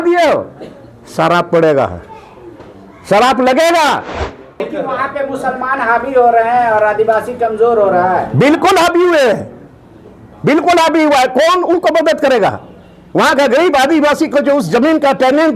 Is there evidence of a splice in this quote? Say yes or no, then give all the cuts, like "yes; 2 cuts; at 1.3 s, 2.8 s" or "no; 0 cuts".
yes; 1 cut; at 4.7 s